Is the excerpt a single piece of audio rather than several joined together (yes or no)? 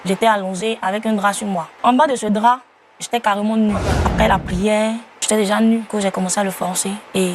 no